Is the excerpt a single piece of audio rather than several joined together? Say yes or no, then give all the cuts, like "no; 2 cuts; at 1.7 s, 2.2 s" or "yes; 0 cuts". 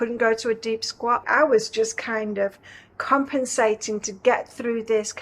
no; 1 cut; at 1.2 s